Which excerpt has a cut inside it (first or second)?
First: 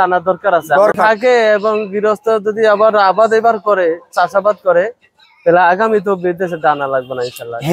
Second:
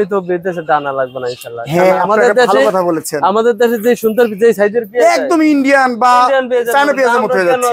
first